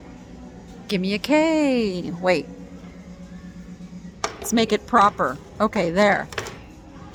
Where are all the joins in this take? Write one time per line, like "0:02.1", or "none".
none

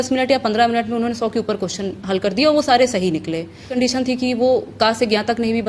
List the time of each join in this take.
0:03.8

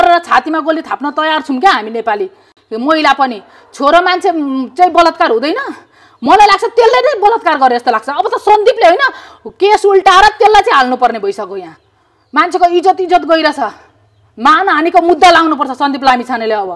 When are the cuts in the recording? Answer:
none

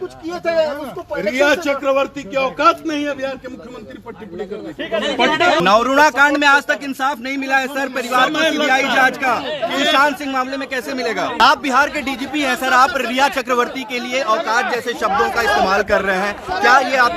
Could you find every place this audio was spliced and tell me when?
0:05.6
0:11.4

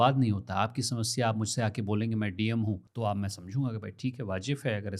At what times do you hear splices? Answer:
0:02.9

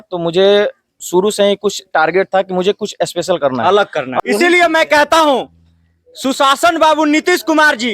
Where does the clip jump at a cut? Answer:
0:04.2

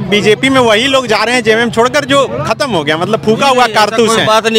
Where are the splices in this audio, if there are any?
none

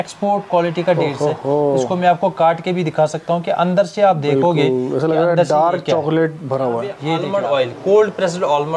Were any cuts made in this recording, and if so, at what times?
0:07.2

